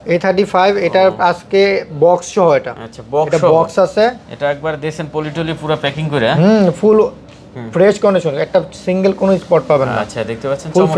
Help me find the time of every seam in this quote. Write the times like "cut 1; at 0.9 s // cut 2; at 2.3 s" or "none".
none